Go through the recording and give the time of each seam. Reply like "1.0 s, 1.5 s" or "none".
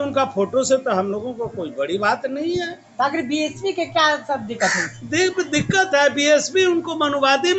none